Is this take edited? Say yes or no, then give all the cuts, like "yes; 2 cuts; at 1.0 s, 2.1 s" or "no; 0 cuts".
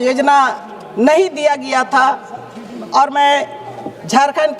no; 0 cuts